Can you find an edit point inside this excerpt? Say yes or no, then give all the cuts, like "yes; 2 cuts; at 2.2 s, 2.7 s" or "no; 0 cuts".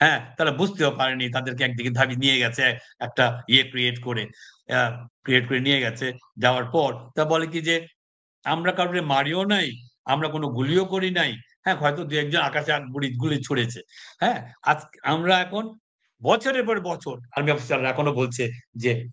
yes; 1 cut; at 17.2 s